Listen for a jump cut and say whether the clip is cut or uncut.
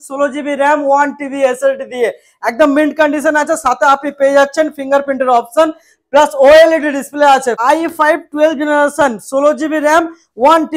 cut